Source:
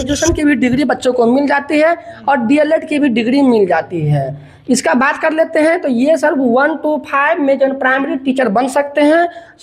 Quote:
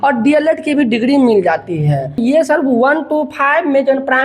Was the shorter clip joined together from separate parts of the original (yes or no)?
yes